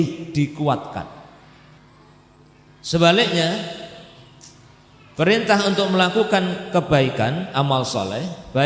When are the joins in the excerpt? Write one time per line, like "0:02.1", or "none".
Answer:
0:01.8